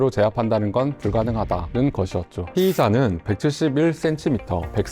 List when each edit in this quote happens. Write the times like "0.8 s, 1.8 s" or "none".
2.4 s